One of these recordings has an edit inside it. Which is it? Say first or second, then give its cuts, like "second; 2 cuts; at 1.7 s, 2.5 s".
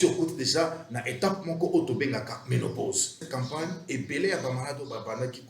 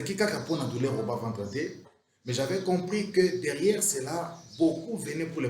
first; 1 cut; at 3.3 s